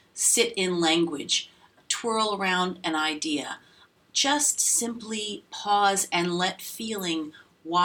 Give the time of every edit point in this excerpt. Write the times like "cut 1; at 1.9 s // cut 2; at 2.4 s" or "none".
cut 1; at 1.8 s // cut 2; at 3.9 s